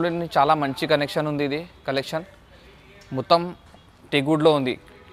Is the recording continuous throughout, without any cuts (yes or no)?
yes